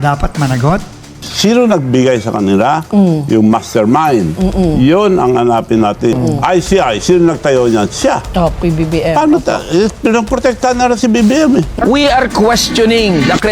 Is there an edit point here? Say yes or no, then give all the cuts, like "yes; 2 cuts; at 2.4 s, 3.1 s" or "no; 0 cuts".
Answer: yes; 2 cuts; at 1.3 s, 11.8 s